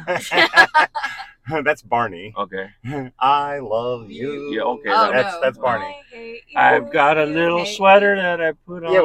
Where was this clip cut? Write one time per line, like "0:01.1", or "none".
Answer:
none